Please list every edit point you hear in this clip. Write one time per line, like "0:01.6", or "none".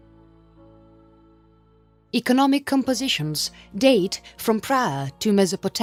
none